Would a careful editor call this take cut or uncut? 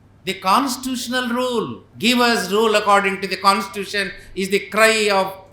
cut